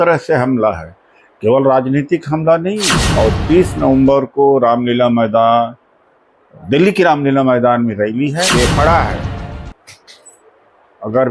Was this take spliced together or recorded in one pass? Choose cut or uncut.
cut